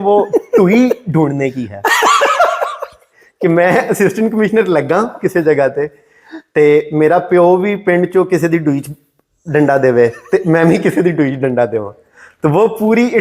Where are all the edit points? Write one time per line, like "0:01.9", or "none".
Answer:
none